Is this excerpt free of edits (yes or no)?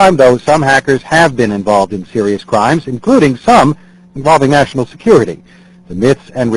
no